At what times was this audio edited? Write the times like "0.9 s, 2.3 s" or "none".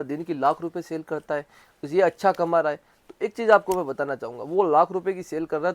none

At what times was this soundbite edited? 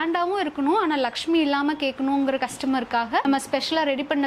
none

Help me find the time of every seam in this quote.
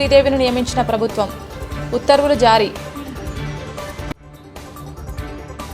3.2 s, 4.5 s

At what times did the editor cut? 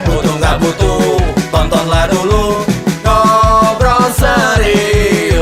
none

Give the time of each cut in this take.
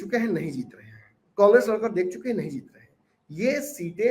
none

